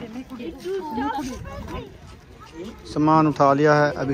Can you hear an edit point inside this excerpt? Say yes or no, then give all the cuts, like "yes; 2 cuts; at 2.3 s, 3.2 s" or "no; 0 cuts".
yes; 1 cut; at 1.9 s